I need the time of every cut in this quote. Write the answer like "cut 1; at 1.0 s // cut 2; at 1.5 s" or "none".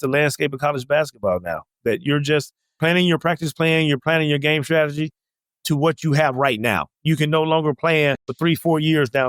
cut 1; at 2.8 s // cut 2; at 8.3 s